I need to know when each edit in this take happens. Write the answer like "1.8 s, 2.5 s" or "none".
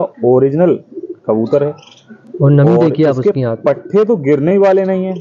none